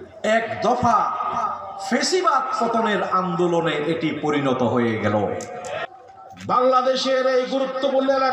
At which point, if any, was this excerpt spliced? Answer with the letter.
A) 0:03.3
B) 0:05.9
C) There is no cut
B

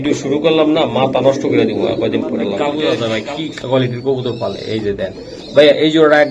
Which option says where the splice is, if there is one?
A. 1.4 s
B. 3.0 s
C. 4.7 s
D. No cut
B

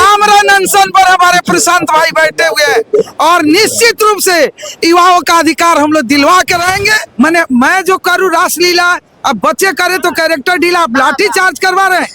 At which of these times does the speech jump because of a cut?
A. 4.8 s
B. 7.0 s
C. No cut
B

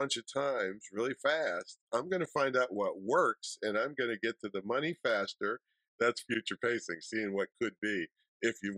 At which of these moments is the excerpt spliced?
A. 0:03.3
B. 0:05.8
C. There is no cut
B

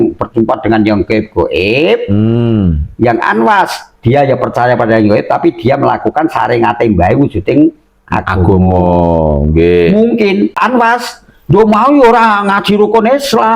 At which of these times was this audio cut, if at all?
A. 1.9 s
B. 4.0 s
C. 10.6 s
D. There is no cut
C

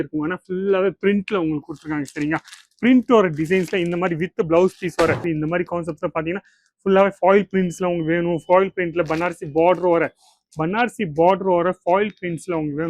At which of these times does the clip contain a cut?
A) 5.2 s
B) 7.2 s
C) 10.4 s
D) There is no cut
A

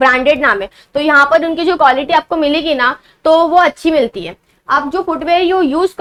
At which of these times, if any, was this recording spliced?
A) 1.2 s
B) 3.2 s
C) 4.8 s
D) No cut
D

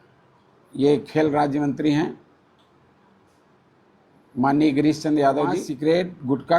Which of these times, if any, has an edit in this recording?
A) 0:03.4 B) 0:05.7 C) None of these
B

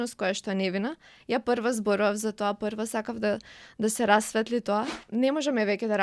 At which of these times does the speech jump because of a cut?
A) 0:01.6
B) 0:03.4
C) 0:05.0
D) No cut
C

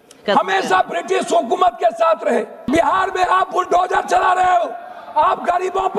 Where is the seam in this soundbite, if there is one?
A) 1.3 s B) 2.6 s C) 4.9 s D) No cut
B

